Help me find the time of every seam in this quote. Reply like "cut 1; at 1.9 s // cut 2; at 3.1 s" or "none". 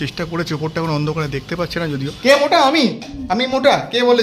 cut 1; at 2.1 s